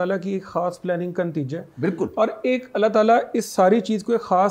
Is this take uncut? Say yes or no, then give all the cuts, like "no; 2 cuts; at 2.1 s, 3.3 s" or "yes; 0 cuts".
yes; 0 cuts